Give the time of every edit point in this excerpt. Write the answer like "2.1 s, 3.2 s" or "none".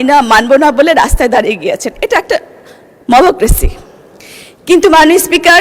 3.8 s

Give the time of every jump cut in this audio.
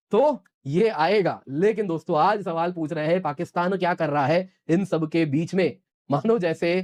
none

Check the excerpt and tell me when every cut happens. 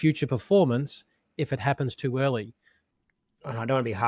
3.0 s

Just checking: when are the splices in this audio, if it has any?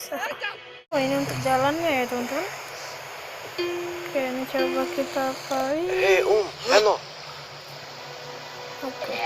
0.9 s

